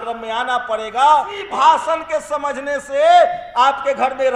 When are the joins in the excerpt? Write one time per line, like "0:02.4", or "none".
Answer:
0:01.4